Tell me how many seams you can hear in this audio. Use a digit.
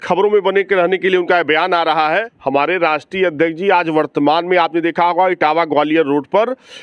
1